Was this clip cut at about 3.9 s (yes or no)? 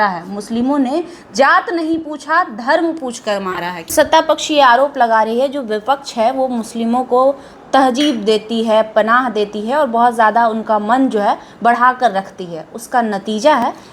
yes